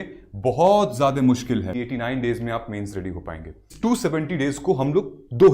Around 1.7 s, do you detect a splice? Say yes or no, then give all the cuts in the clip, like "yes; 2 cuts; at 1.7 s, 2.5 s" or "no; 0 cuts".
yes; 2 cuts; at 1.7 s, 3.6 s